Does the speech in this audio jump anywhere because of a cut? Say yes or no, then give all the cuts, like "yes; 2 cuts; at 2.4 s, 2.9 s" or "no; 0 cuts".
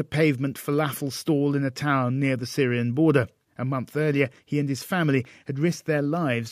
yes; 1 cut; at 1.0 s